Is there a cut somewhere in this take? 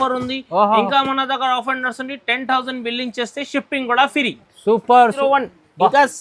yes; 1 cut; at 5.2 s

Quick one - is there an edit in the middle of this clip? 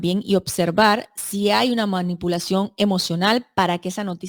no; 0 cuts

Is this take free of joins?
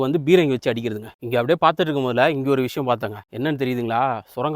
no; 2 cuts; at 1.1 s, 3.2 s

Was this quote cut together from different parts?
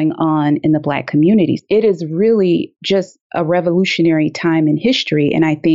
yes; 1 cut; at 1.6 s

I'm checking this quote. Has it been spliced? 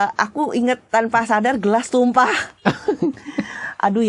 no; 0 cuts

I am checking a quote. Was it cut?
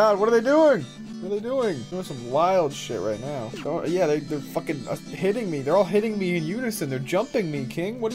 yes; 3 cuts; at 1.0 s, 1.9 s, 3.5 s

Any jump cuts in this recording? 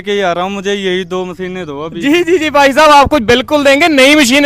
no; 0 cuts

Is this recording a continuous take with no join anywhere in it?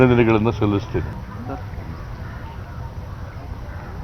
no; 1 cut; at 1.2 s

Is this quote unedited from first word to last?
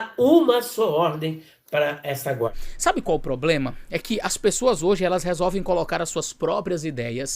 no; 1 cut; at 2.6 s

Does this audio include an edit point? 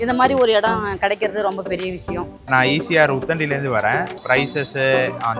yes; 2 cuts; at 2.5 s, 4.2 s

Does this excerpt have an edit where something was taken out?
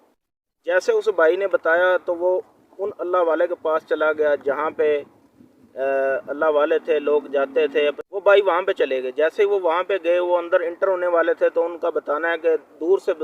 yes; 1 cut; at 8.1 s

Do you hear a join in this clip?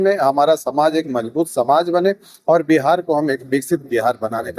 no; 0 cuts

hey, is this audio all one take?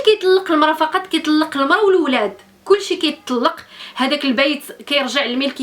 no; 1 cut; at 3.7 s

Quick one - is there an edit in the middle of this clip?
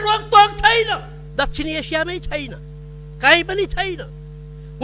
yes; 1 cut; at 1.2 s

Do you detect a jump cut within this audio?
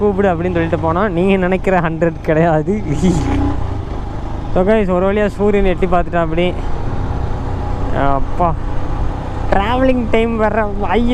no; 0 cuts

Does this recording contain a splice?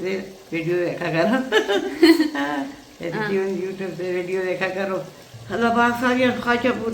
yes; 1 cut; at 5.2 s

